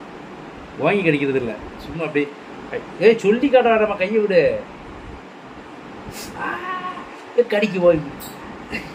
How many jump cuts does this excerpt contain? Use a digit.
0